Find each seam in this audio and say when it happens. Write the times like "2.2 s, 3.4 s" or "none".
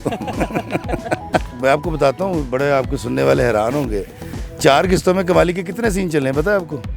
none

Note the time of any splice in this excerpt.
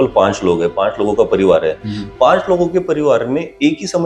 none

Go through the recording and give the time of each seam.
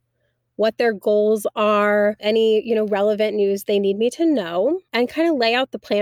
2.2 s, 4.9 s

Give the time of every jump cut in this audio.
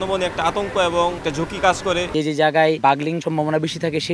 1.2 s, 2.1 s, 3.0 s

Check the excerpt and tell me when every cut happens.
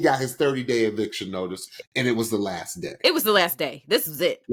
none

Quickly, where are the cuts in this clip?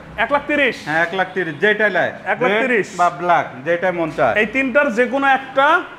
none

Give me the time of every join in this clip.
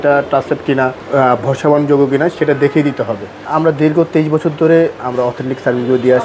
1.0 s, 3.5 s

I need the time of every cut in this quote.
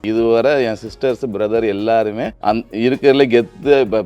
2.3 s

